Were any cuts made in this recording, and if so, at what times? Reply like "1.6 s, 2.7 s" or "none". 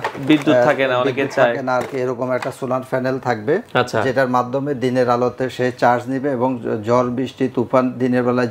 none